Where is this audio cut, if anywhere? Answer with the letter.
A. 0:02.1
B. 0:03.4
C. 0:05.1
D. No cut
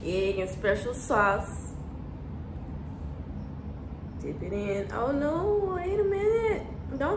D